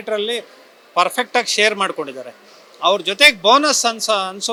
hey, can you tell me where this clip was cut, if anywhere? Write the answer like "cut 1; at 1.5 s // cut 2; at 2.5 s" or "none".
none